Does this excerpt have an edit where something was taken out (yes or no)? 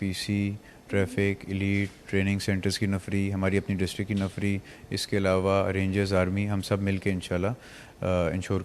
no